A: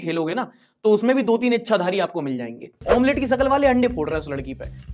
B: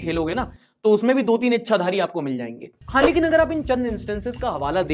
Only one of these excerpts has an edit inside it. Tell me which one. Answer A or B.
A